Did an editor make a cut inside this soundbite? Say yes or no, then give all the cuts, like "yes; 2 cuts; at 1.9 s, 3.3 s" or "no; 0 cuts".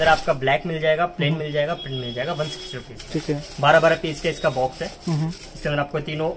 no; 0 cuts